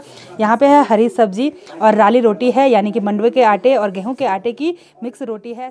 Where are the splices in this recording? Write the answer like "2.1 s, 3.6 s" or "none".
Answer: none